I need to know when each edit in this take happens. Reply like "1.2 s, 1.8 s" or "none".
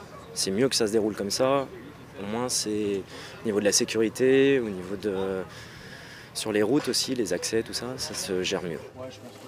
none

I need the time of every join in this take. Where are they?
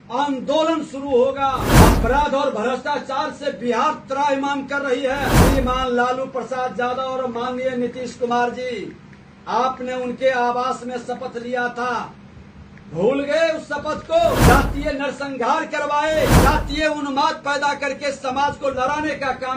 1.7 s, 5.4 s, 14.4 s, 16.3 s

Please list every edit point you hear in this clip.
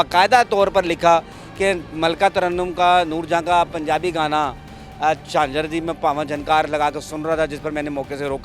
none

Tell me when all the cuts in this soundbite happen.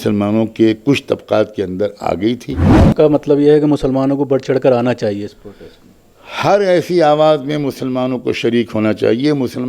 2.7 s

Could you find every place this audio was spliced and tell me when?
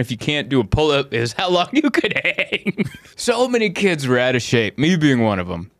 3.0 s

